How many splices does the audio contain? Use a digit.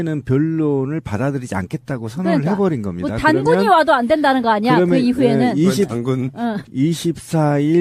0